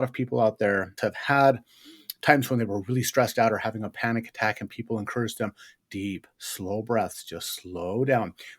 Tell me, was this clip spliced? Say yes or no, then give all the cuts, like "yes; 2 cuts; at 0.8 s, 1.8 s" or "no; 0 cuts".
yes; 1 cut; at 0.9 s